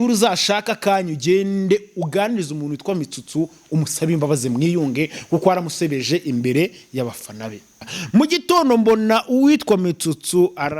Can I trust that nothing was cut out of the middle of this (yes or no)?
no